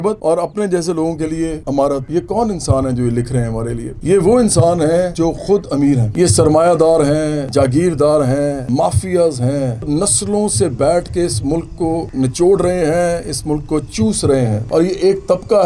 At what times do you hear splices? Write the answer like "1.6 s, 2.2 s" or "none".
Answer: 2.0 s, 5.1 s, 6.1 s, 7.4 s, 8.6 s, 9.8 s, 12.1 s, 14.6 s